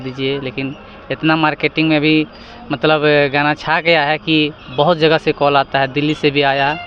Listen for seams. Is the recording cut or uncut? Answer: uncut